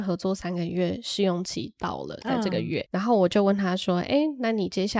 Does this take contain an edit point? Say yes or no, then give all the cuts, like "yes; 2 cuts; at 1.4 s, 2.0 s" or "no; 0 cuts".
no; 0 cuts